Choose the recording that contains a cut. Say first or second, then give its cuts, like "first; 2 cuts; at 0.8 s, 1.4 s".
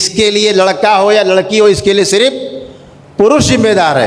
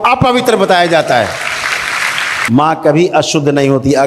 second; 1 cut; at 2.3 s